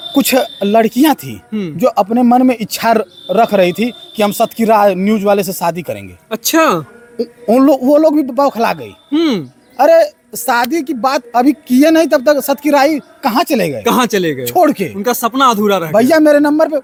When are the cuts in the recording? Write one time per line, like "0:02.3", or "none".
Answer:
none